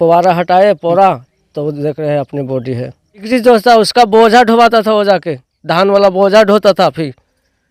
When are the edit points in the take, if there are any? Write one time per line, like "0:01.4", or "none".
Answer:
0:03.2